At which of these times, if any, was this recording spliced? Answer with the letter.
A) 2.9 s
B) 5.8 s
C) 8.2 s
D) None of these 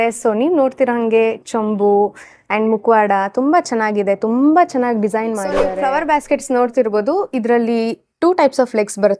B